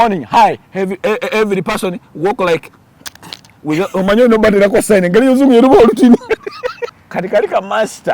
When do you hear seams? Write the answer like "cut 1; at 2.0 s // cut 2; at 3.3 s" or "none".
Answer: cut 1; at 6.9 s